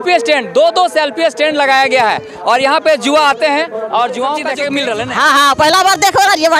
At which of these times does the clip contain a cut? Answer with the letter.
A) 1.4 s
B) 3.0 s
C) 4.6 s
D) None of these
C